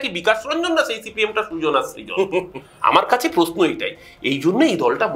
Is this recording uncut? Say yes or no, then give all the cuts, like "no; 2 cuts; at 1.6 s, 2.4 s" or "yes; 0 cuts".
yes; 0 cuts